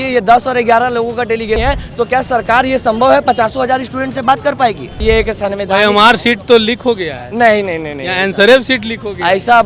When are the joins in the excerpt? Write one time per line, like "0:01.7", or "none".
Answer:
0:01.6
0:05.0

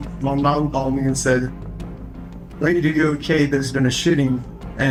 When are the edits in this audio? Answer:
none

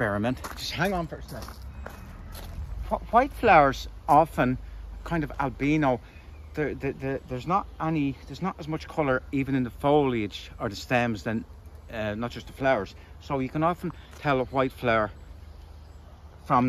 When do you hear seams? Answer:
0:02.6

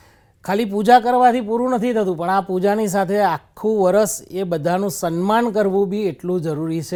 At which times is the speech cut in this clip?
none

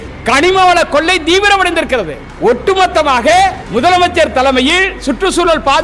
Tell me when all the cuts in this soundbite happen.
0:02.2
0:03.6

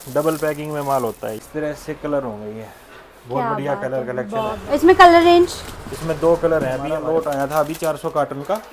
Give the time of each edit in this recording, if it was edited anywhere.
0:01.5
0:04.6
0:06.9

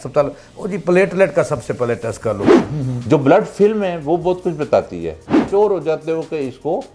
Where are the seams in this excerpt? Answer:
0:02.5
0:05.4

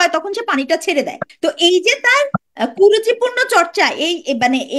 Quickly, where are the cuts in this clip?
0:01.2
0:02.4

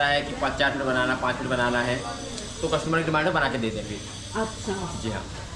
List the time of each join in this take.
none

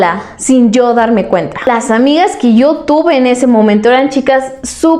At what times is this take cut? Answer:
0:01.6

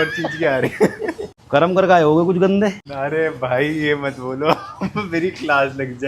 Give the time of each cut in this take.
0:01.3
0:02.9

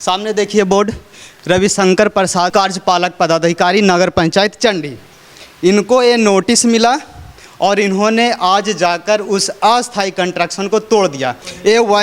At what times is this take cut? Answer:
none

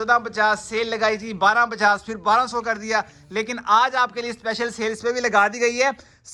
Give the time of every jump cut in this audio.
none

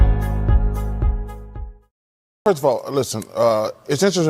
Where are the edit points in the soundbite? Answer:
0:02.4

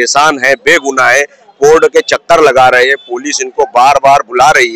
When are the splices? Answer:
none

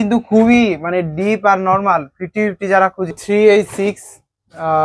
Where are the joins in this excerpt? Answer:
0:03.2

